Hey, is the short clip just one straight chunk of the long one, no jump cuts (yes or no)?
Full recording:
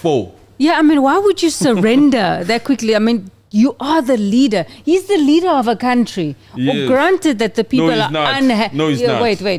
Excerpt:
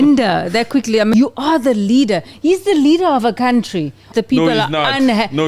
no